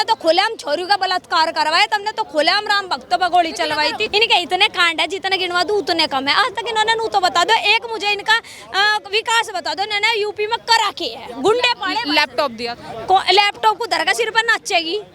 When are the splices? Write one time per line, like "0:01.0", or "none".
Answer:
0:04.0